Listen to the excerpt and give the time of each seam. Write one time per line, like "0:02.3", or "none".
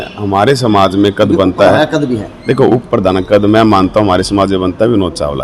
none

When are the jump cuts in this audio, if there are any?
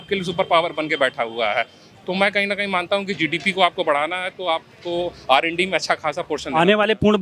none

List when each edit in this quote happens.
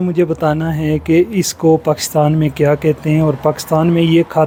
none

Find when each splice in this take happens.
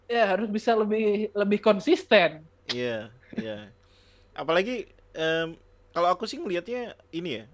none

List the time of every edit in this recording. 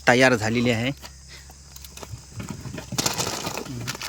none

